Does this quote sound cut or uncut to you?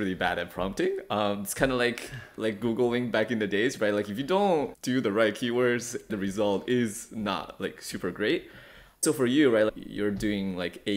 cut